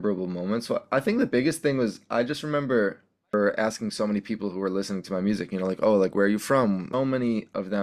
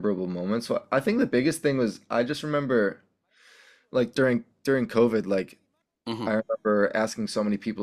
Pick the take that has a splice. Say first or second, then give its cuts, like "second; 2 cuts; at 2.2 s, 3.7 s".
first; 2 cuts; at 3.3 s, 6.9 s